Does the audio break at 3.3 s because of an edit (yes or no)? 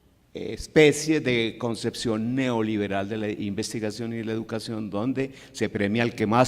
no